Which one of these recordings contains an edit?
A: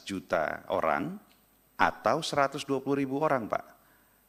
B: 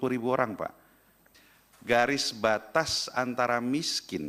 B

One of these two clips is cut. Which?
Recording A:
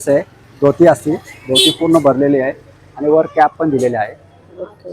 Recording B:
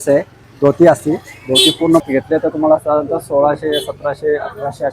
B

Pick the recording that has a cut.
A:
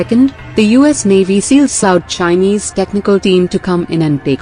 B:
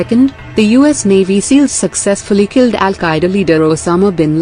B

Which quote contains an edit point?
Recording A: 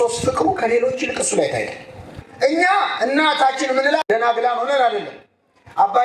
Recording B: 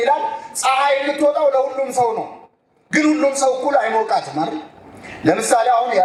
A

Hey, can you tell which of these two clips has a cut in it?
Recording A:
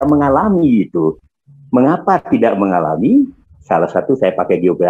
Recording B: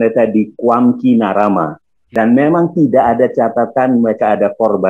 B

